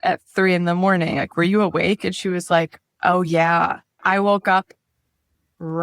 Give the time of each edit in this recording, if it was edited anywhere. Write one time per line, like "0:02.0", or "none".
0:02.8
0:04.0